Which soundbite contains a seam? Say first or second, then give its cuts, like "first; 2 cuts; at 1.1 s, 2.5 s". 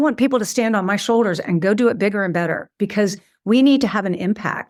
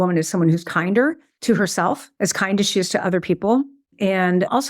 second; 3 cuts; at 1.3 s, 2.1 s, 3.8 s